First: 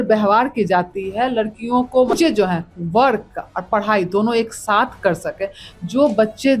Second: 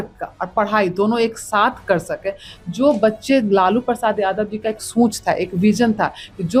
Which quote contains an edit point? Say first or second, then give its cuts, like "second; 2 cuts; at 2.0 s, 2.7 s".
first; 1 cut; at 2.1 s